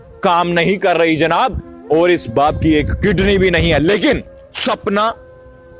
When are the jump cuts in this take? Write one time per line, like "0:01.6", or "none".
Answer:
none